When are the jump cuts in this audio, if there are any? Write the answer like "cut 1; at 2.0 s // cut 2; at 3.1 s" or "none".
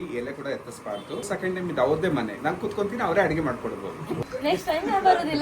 cut 1; at 1.3 s // cut 2; at 4.2 s